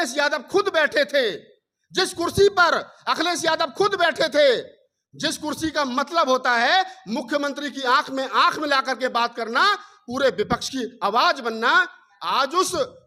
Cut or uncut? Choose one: uncut